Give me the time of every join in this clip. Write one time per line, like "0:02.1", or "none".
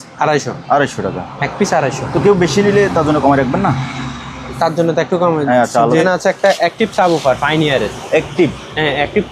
0:06.0